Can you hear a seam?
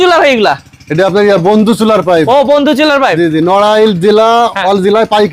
no; 0 cuts

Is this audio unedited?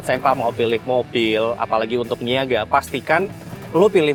yes; 0 cuts

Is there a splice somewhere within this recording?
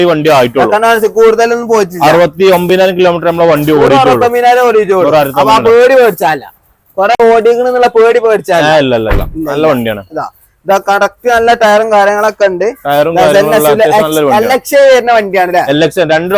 no; 0 cuts

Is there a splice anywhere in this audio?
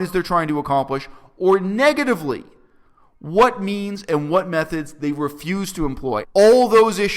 yes; 1 cut; at 6.2 s

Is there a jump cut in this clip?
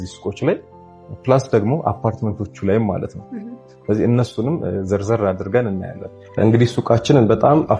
yes; 1 cut; at 6.4 s

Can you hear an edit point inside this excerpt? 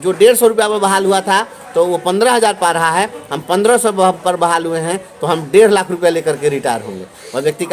no; 0 cuts

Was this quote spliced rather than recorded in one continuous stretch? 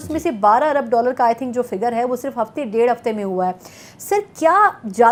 no; 0 cuts

